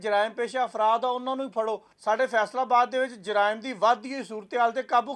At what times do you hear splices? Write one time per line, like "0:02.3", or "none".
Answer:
0:01.9

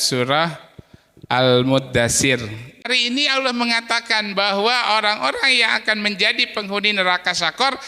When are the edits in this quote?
0:02.9

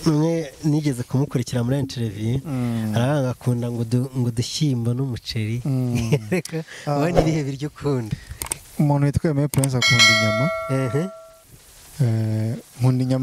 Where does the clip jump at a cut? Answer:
none

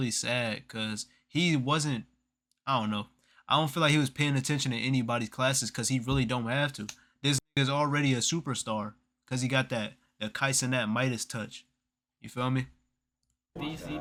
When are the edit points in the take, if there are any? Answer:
none

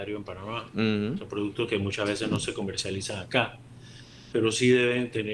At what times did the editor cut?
none

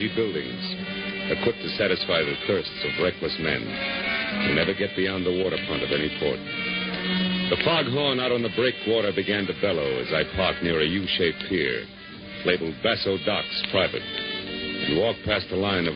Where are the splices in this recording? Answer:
0:11.9

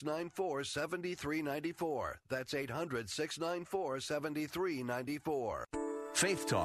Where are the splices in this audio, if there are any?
0:05.7

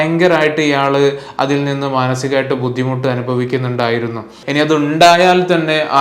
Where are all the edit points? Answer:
0:04.4

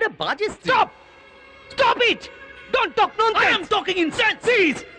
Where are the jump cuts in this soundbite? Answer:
none

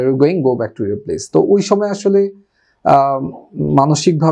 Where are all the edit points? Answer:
none

